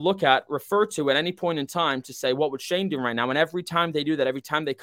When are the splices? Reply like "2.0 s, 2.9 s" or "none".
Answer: none

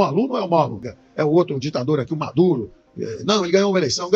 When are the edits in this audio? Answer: 1.0 s

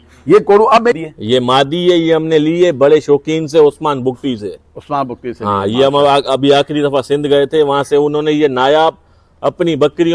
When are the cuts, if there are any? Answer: 1.0 s

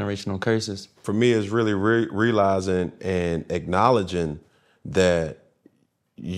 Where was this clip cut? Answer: 1.0 s

